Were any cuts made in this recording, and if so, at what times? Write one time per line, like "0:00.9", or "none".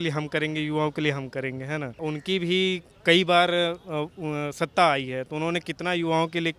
0:02.0